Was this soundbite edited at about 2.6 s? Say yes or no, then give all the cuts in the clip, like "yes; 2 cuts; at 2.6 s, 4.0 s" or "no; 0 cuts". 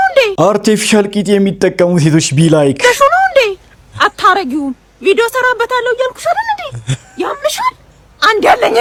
no; 0 cuts